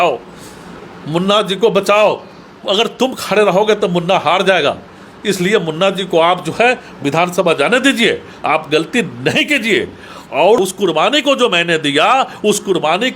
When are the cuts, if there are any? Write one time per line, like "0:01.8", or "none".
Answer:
0:10.6